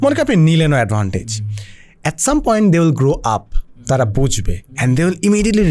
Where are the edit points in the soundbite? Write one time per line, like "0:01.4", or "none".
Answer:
none